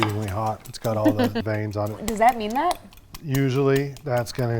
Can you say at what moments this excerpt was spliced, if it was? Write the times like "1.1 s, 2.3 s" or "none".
2.0 s